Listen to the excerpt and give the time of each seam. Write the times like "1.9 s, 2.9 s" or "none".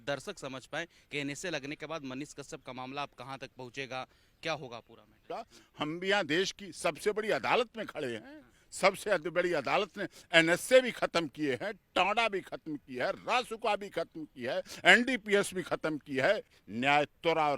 5.3 s, 16.6 s